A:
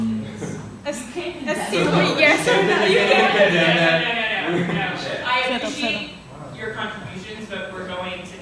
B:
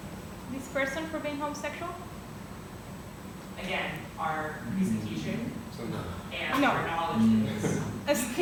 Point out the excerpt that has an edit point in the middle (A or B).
A